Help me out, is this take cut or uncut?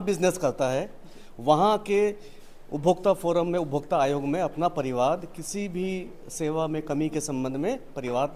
uncut